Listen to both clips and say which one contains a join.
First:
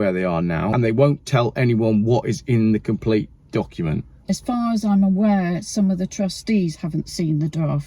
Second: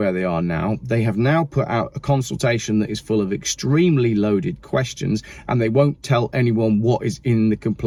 first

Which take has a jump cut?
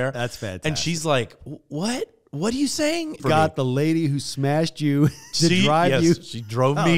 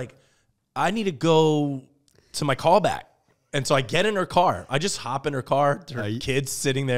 first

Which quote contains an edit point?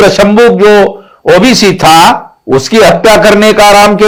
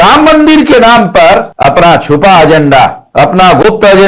second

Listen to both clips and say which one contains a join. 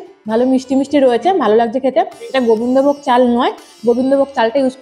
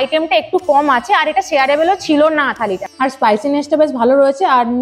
second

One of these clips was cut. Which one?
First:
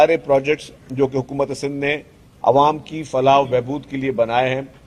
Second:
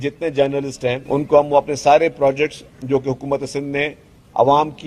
second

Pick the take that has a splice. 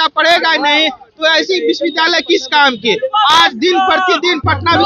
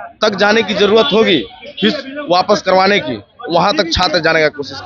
first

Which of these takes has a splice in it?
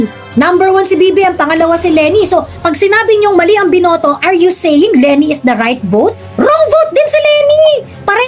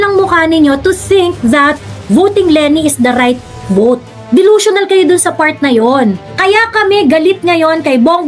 second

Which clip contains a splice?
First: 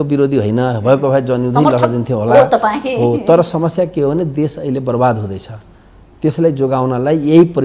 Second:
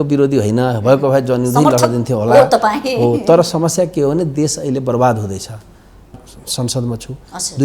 second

